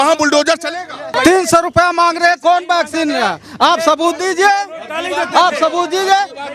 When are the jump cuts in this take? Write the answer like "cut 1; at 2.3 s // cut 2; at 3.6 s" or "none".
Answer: cut 1; at 1.1 s